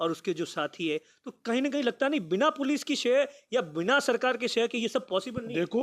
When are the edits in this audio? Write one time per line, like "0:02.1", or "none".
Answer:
none

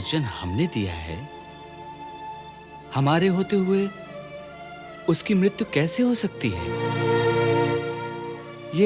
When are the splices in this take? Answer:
none

